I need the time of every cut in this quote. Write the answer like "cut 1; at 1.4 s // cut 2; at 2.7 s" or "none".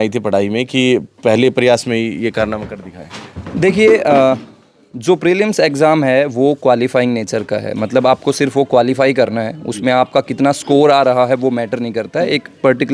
none